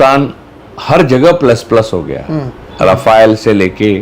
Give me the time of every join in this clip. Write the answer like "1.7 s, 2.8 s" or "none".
2.6 s